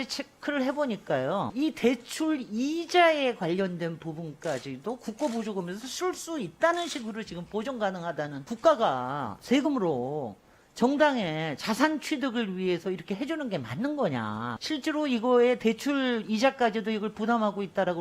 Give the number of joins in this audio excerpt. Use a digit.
3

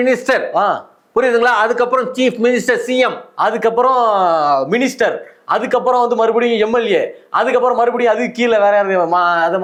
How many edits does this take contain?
0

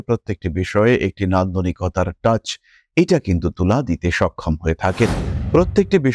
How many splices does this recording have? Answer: 0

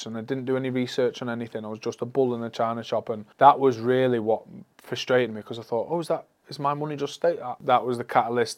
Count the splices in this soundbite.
2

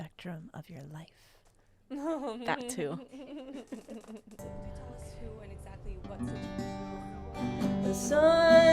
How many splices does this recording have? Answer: 1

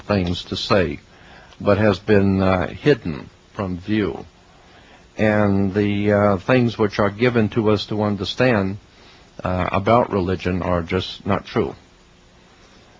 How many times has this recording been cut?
1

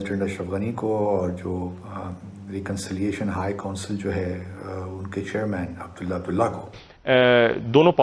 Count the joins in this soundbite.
1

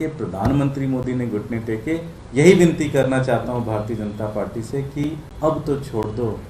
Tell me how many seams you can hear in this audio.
2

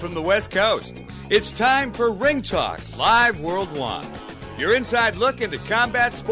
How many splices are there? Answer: 0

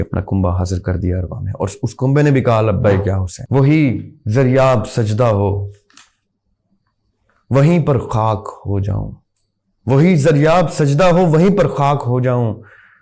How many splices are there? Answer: 1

